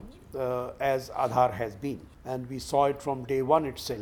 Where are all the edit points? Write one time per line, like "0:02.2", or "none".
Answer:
0:02.1